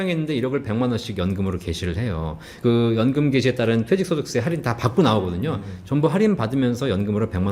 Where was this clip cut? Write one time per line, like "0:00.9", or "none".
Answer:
0:02.5